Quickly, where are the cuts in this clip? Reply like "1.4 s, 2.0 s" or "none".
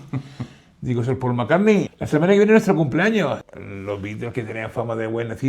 2.0 s, 3.4 s